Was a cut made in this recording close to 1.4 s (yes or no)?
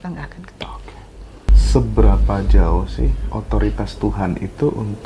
yes